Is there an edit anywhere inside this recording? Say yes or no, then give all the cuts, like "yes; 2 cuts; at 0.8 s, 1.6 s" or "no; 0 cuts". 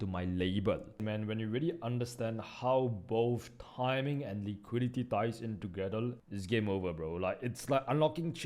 yes; 2 cuts; at 1.0 s, 6.3 s